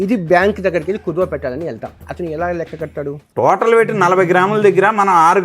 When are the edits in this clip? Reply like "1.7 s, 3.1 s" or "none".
none